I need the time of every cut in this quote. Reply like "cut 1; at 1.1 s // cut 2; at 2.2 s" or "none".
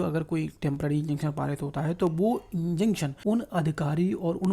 cut 1; at 3.1 s